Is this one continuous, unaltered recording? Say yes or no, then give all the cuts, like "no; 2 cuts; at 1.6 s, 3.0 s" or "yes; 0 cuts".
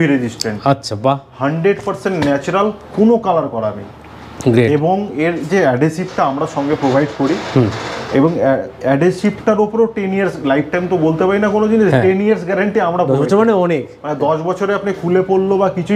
yes; 0 cuts